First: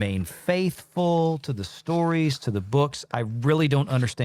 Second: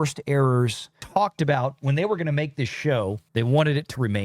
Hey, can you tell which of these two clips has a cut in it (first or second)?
second